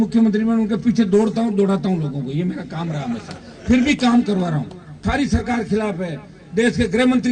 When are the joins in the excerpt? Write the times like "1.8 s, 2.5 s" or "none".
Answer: 5.0 s

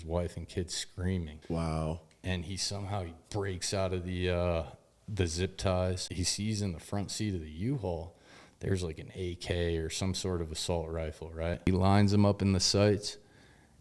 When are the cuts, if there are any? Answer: 1.3 s, 6.1 s, 11.6 s

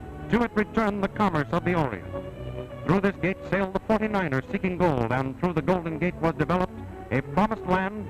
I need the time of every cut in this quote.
none

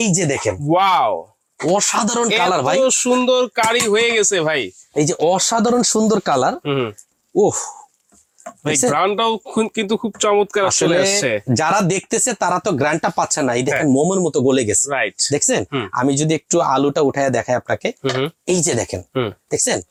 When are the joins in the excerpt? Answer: none

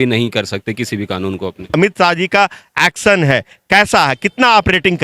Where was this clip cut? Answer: 1.7 s

